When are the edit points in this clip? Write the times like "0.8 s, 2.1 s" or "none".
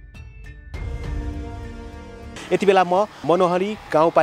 2.3 s, 3.2 s